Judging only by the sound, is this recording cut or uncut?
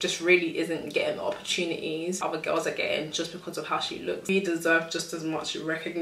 cut